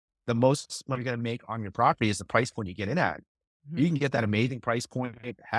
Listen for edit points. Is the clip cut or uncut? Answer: uncut